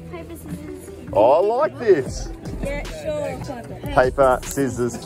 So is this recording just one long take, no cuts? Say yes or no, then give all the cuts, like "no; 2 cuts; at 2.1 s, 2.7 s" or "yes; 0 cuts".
no; 1 cut; at 3.4 s